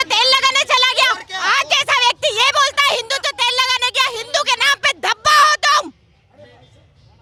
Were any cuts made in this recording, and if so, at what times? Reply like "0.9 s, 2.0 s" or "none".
none